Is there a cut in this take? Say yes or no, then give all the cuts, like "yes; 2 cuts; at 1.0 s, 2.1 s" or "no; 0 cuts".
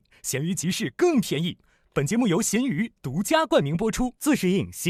no; 0 cuts